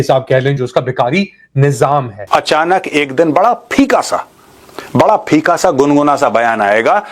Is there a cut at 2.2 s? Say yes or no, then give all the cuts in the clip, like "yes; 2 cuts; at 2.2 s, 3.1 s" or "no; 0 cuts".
yes; 1 cut; at 2.2 s